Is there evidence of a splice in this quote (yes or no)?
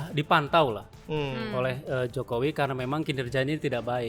no